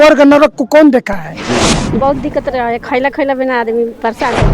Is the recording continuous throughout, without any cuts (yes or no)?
no